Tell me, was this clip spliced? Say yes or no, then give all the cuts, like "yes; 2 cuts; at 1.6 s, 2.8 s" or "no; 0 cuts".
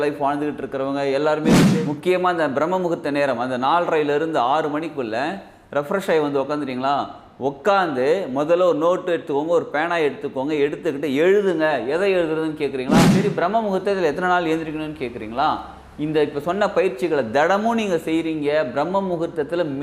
yes; 2 cuts; at 1.7 s, 13.1 s